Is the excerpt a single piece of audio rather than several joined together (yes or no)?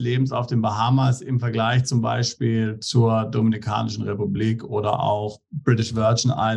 yes